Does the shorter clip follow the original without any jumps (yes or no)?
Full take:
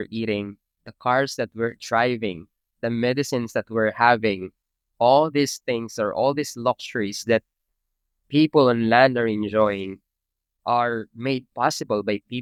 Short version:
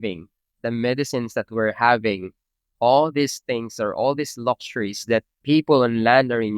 no